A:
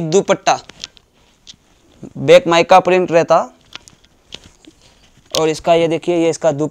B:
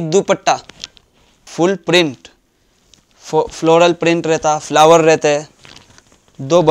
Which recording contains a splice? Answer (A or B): B